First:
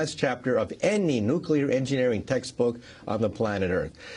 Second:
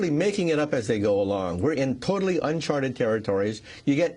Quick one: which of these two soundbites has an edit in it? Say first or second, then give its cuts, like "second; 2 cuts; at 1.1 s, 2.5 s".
second; 1 cut; at 2.0 s